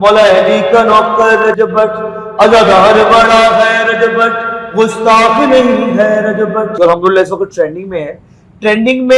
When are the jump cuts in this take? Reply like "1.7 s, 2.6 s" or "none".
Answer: 6.7 s